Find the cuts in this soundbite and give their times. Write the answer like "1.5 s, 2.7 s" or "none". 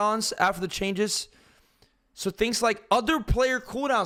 none

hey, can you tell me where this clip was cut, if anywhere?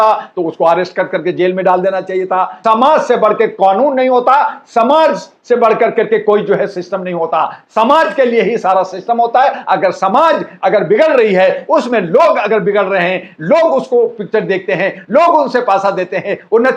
2.5 s

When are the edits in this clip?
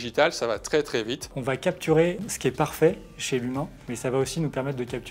1.3 s, 3.8 s

